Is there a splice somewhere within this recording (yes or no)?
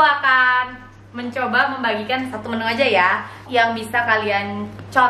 yes